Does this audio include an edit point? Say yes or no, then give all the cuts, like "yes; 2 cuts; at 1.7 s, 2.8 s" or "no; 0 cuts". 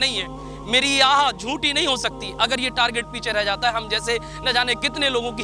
no; 0 cuts